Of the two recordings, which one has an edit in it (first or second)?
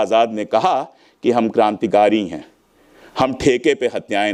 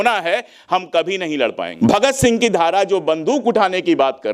second